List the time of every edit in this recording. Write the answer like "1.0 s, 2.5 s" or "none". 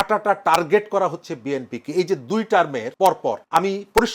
3.0 s